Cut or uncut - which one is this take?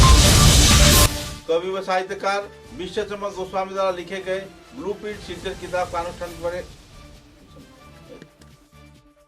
cut